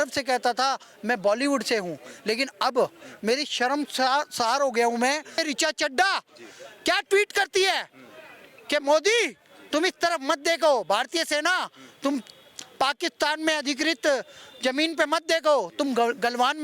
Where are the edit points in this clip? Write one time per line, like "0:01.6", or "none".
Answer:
0:05.3